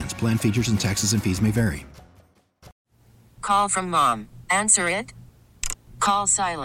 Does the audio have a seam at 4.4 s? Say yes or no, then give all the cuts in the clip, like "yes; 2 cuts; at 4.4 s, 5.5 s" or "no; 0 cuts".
no; 1 cut; at 2.7 s